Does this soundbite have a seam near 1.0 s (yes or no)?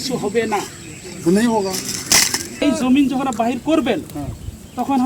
no